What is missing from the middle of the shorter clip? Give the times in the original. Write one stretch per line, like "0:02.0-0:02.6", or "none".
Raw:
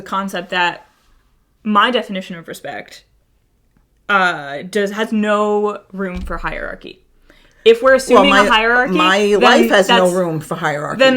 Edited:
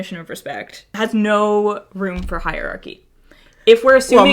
0:03.1-0:04.9

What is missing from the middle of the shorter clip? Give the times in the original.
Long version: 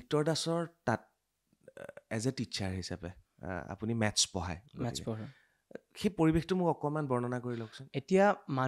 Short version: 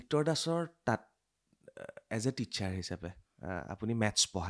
none

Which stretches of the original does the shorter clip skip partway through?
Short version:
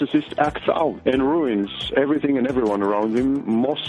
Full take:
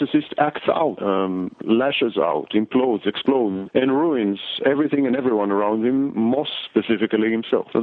0:01.0-0:03.7

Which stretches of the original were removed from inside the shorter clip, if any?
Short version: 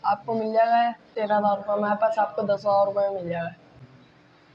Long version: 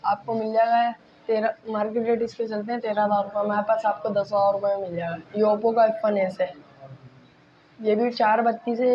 0:01.1-0:02.8
0:05.2-0:06.8

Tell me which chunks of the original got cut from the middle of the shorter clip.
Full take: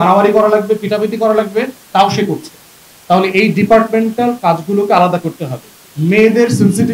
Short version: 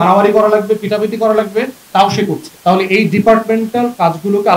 0:02.5-0:02.9

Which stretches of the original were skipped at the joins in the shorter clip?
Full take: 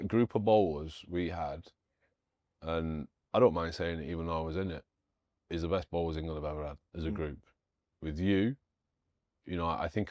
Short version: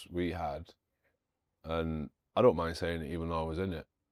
none

